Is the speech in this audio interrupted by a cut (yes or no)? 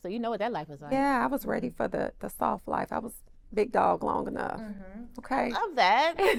no